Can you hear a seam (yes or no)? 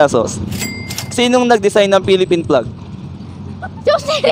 no